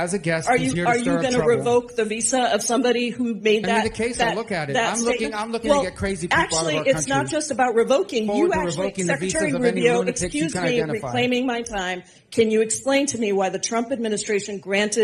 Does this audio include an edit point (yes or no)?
no